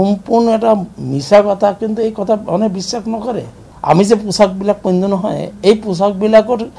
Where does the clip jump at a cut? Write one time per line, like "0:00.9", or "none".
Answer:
0:03.7